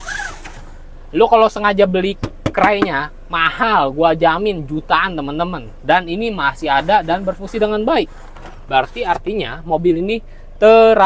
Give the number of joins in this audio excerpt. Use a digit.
0